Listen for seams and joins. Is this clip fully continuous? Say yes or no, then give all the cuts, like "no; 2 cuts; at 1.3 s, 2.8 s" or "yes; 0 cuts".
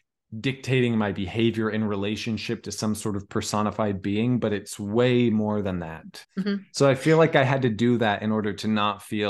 no; 1 cut; at 6.2 s